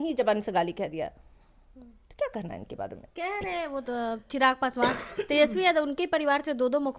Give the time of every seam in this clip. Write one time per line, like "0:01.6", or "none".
none